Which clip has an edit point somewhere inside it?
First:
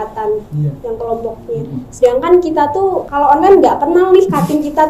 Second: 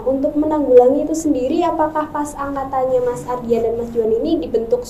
first; 1 cut; at 3.1 s

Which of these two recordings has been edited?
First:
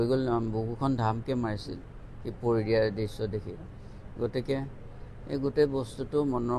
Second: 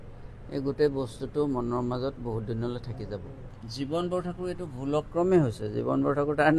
second; 1 cut; at 3.6 s

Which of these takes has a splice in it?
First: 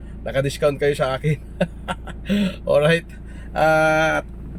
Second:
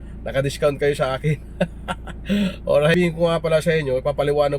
second; 1 cut; at 2.9 s

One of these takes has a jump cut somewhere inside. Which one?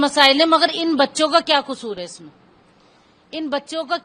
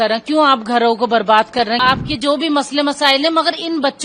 second; 1 cut; at 1.8 s

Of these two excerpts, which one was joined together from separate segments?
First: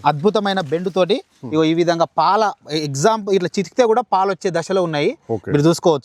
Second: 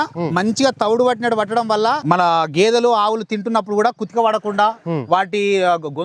second; 1 cut; at 2.0 s

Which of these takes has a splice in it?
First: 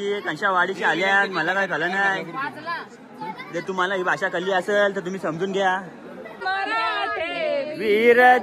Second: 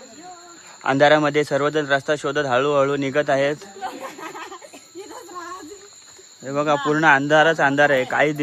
first; 1 cut; at 6.4 s

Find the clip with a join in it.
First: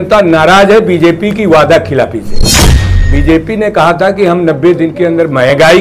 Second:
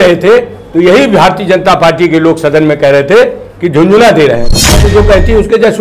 second; 1 cut; at 4.8 s

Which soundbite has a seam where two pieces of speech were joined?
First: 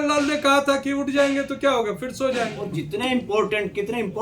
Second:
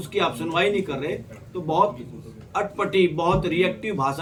first; 1 cut; at 2.7 s

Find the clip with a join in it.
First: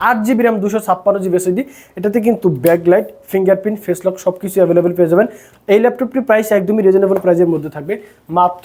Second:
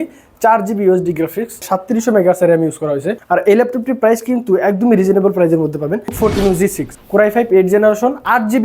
second; 3 cuts; at 3.1 s, 6.1 s, 6.9 s

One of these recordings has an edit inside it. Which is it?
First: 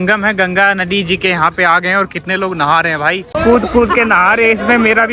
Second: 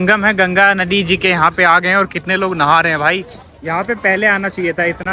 first; 1 cut; at 3.3 s

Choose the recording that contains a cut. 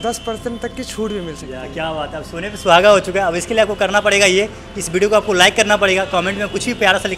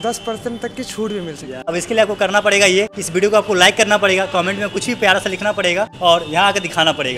second; 3 cuts; at 1.7 s, 3.0 s, 5.9 s

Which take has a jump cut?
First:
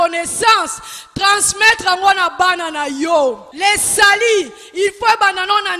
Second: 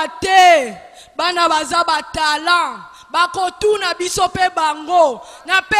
first; 1 cut; at 3.5 s

